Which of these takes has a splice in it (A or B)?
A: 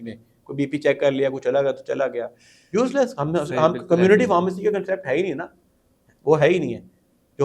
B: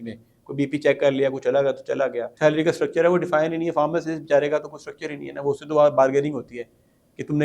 B